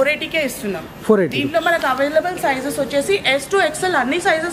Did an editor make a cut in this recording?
no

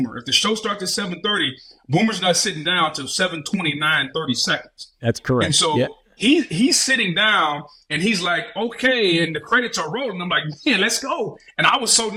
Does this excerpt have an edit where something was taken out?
no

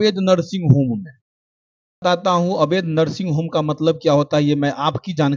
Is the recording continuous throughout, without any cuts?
no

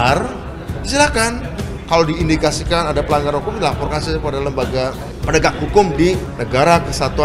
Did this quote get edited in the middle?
yes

